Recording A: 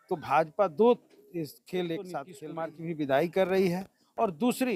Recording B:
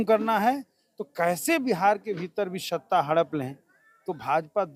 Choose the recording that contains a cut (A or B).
A